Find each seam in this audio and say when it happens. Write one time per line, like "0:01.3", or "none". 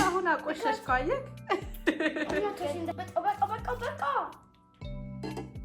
0:02.9